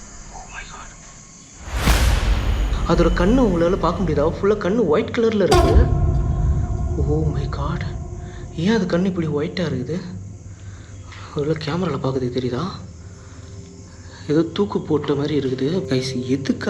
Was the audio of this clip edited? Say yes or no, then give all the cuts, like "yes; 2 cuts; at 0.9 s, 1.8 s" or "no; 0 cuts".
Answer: yes; 2 cuts; at 1.5 s, 2.7 s